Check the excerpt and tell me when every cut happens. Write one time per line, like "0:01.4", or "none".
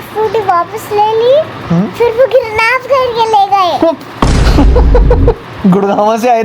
none